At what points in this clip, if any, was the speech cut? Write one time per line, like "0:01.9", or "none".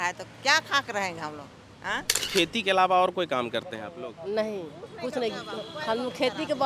0:02.2